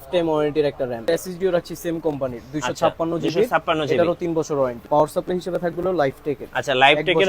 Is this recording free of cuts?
no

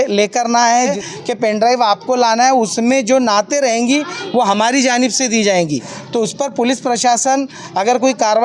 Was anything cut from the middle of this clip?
yes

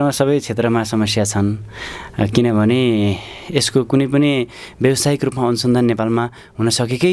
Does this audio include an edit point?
no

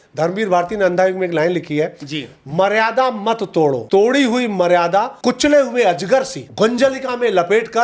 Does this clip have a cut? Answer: yes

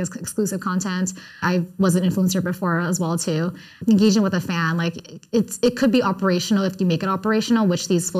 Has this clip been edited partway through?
yes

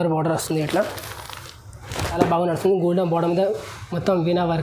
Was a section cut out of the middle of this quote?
yes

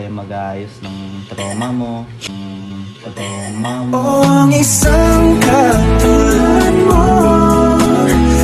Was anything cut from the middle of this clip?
no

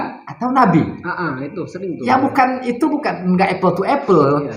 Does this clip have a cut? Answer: no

